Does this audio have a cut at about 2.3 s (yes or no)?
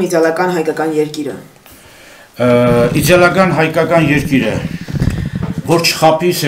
no